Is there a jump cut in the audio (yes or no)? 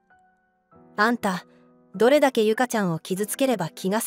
yes